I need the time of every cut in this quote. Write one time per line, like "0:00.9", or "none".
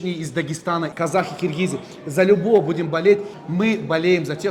0:03.4